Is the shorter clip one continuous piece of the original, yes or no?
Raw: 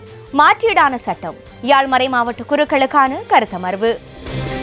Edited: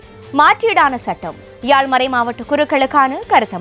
yes